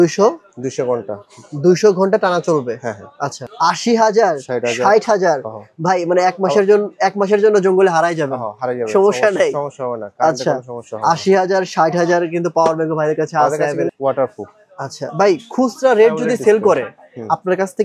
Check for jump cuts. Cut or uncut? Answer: cut